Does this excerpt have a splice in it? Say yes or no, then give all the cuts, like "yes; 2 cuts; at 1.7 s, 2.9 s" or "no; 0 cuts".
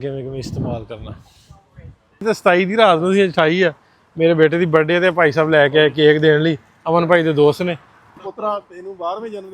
yes; 2 cuts; at 2.2 s, 8.2 s